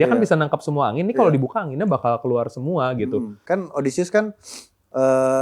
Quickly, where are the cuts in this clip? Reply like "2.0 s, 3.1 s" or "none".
3.4 s